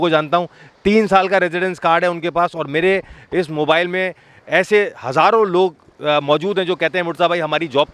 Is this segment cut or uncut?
uncut